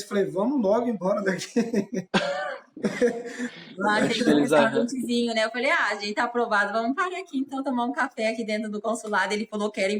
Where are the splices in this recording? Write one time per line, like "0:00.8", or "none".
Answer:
none